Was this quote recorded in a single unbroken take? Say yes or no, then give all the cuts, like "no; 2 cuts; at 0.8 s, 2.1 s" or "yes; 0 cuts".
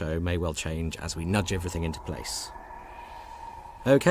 no; 1 cut; at 1.3 s